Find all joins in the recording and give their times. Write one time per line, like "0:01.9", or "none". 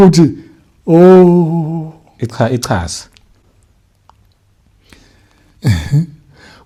none